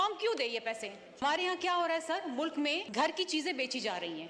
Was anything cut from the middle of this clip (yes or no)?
yes